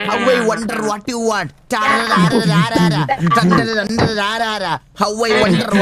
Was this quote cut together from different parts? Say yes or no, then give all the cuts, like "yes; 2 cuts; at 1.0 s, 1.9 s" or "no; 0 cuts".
no; 0 cuts